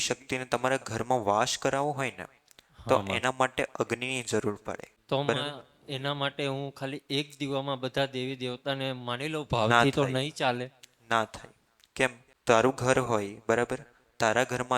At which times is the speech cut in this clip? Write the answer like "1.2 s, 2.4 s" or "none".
4.9 s, 12.4 s